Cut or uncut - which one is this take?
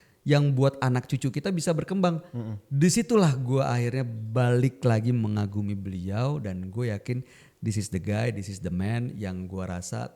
uncut